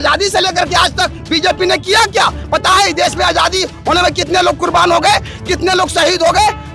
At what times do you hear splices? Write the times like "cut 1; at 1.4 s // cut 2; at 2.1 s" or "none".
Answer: none